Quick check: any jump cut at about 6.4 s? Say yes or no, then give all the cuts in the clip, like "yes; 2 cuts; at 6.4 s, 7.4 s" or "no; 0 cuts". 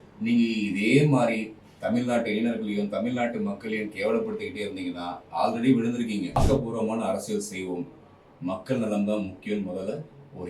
yes; 1 cut; at 6.4 s